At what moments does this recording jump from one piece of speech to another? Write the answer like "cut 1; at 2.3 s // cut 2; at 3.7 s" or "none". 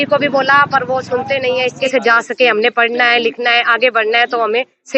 cut 1; at 1.8 s